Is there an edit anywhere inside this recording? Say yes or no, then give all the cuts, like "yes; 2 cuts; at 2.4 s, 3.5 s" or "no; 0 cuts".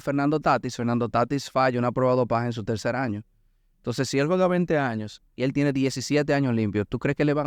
no; 0 cuts